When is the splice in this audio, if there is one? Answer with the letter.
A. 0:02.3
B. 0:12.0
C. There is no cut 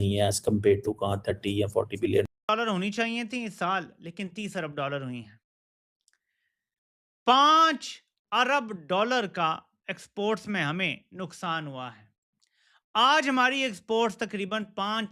A